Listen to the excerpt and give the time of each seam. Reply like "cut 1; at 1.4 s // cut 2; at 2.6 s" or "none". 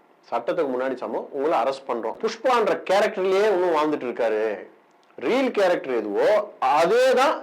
cut 1; at 2.2 s